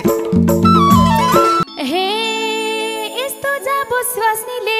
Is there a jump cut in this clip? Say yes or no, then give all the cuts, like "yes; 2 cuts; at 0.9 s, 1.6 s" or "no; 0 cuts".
yes; 1 cut; at 1.6 s